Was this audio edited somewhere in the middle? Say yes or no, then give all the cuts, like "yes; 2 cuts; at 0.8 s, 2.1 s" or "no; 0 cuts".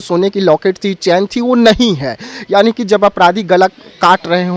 no; 0 cuts